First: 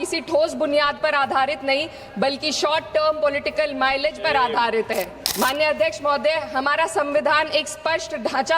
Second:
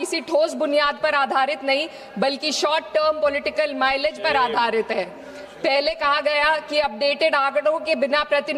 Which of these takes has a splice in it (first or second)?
first